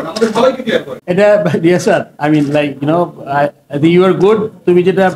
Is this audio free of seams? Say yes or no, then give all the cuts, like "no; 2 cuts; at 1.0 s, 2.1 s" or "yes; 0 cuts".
no; 1 cut; at 1.0 s